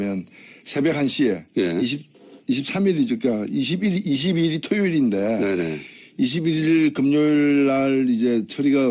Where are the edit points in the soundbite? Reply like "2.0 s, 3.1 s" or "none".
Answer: 6.1 s

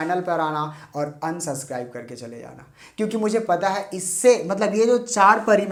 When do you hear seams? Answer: none

